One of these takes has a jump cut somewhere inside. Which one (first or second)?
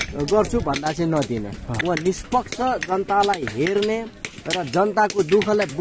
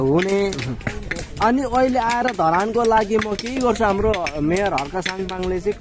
first